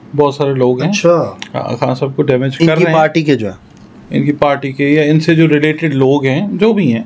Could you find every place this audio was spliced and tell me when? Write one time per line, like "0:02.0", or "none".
none